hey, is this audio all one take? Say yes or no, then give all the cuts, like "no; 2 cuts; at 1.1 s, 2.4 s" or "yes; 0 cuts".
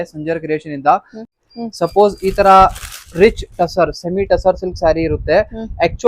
no; 1 cut; at 1.2 s